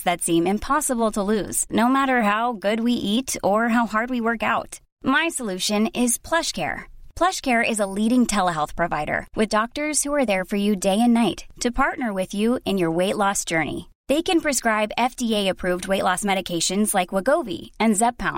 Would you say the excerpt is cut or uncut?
uncut